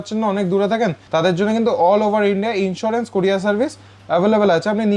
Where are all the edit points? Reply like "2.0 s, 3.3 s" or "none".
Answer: 1.0 s